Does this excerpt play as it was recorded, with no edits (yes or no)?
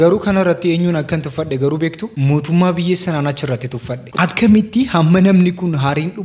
no